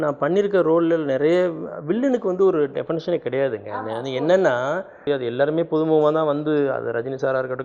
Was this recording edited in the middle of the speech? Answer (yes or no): yes